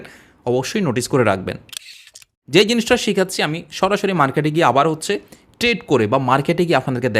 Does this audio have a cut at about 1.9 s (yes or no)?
yes